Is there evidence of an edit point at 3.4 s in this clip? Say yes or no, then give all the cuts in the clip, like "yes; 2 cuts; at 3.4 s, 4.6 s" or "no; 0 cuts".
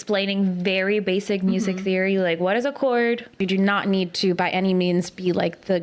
yes; 1 cut; at 3.4 s